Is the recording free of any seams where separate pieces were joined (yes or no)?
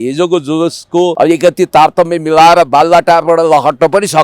no